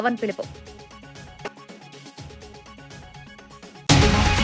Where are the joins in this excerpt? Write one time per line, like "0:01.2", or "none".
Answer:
none